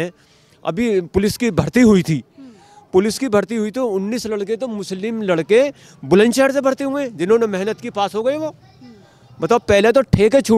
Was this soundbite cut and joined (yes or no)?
no